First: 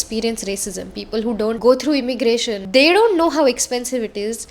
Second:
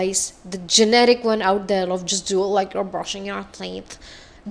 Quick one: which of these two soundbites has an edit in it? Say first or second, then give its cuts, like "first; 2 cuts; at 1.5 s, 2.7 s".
first; 2 cuts; at 1.6 s, 2.6 s